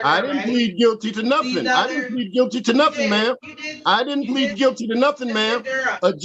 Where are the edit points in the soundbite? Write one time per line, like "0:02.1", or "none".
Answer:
none